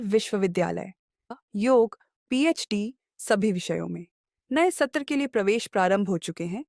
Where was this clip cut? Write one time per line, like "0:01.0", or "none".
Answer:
0:01.3